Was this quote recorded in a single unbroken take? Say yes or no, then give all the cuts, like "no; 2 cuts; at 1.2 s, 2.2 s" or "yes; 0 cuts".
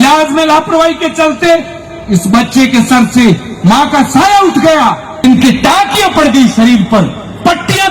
no; 1 cut; at 5.2 s